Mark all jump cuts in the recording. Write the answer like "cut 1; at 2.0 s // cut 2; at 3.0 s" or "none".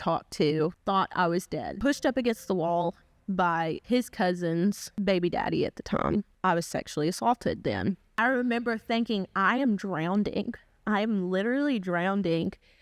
cut 1; at 0.8 s // cut 2; at 1.7 s // cut 3; at 3.8 s // cut 4; at 4.9 s // cut 5; at 6.1 s // cut 6; at 8.1 s